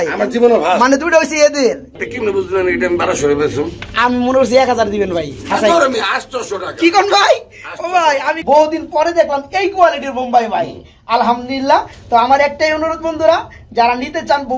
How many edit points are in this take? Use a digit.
2